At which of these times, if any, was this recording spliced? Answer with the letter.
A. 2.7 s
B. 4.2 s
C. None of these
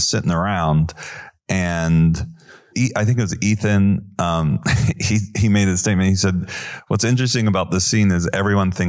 A